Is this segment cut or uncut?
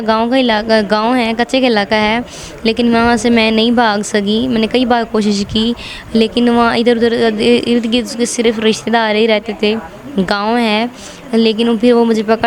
uncut